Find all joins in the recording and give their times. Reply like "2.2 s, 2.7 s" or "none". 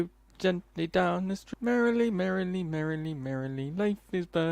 1.4 s